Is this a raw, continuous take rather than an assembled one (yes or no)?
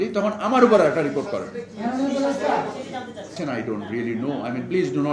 no